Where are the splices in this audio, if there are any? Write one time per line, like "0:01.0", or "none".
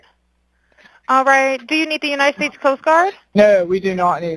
0:03.2